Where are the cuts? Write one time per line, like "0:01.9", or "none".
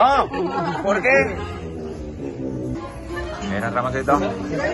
none